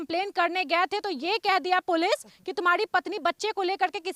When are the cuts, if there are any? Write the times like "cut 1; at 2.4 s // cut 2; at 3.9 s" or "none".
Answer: none